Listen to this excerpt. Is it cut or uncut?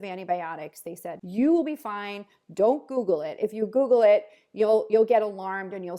cut